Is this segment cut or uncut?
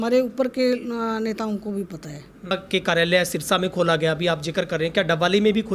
cut